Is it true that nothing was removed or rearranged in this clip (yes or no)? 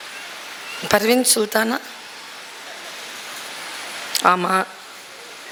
yes